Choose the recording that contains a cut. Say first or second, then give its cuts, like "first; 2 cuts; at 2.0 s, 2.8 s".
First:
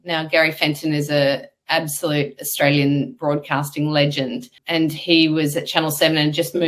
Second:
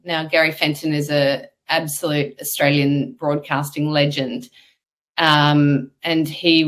first; 1 cut; at 4.6 s